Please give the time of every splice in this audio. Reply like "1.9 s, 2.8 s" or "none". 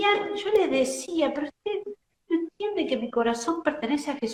none